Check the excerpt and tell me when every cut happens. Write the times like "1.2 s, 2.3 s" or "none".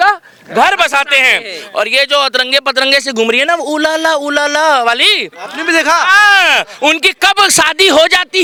none